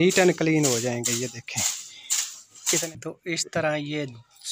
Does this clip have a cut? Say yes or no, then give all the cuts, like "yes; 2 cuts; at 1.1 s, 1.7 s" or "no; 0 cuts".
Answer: yes; 1 cut; at 2.8 s